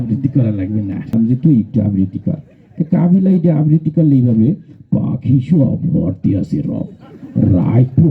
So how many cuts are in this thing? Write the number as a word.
one